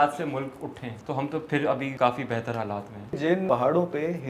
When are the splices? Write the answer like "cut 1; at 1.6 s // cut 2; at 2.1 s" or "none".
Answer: cut 1; at 0.9 s // cut 2; at 1.9 s // cut 3; at 3.4 s